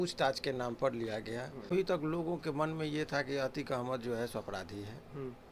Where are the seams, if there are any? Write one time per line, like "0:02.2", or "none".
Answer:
0:01.7